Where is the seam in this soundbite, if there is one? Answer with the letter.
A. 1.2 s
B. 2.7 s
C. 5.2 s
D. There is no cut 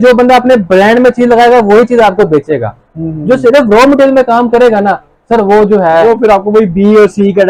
D